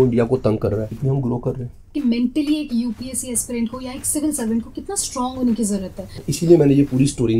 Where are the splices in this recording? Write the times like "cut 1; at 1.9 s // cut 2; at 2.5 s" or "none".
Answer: cut 1; at 1.0 s // cut 2; at 1.9 s // cut 3; at 6.2 s